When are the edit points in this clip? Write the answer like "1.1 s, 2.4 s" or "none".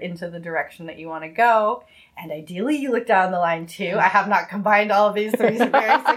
none